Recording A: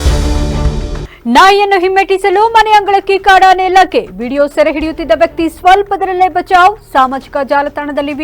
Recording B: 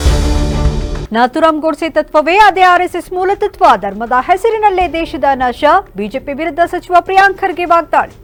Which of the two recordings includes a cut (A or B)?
A